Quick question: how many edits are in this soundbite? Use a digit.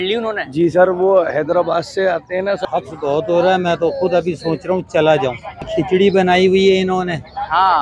2